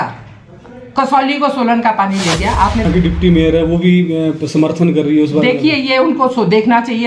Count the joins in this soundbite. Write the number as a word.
one